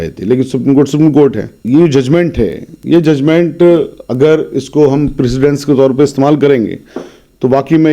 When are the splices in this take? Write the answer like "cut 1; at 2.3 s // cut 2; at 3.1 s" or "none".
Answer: cut 1; at 1.5 s